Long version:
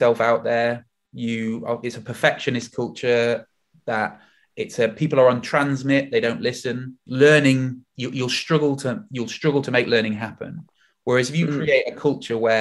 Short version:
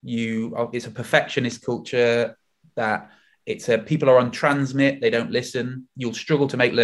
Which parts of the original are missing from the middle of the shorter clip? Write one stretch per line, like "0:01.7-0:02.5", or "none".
0:07.0-0:09.0